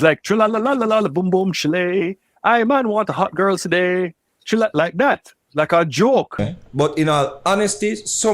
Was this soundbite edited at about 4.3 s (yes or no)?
no